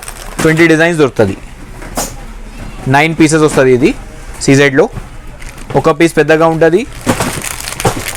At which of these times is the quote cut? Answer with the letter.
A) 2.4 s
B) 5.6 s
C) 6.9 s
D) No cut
D